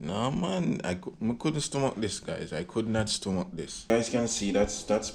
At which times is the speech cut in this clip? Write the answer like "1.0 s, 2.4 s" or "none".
3.9 s

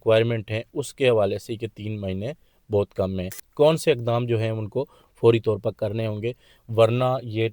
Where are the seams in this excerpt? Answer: 3.4 s

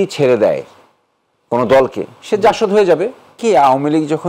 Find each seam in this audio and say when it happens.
3.3 s

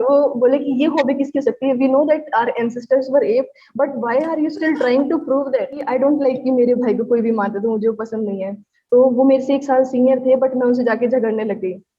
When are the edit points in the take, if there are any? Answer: 5.8 s

